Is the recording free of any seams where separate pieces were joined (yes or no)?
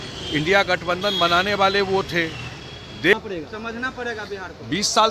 no